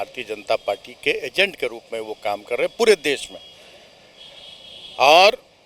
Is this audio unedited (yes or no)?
yes